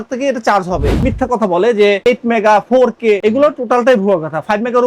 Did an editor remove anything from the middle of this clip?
yes; 2 cuts; at 0.9 s, 2.0 s

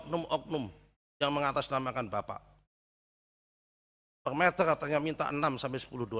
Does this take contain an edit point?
no; 0 cuts

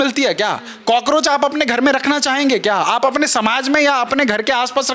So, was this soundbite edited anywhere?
no; 0 cuts

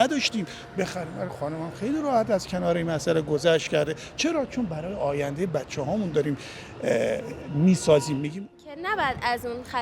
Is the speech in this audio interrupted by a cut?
yes; 1 cut; at 8.4 s

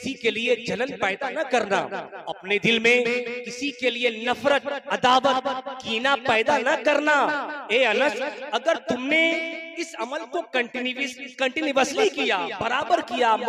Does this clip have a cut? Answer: no; 0 cuts

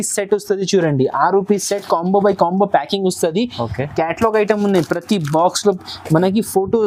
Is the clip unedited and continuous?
yes; 0 cuts

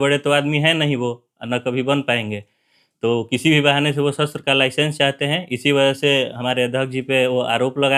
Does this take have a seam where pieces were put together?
no; 0 cuts

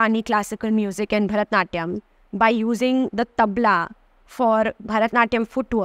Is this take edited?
no; 0 cuts

